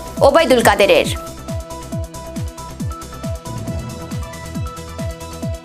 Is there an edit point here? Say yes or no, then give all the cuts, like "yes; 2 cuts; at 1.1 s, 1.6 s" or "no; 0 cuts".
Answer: yes; 2 cuts; at 1.0 s, 4.4 s